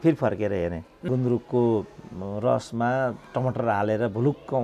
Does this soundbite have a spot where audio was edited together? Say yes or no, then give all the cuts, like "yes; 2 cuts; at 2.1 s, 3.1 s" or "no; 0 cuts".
yes; 1 cut; at 1.0 s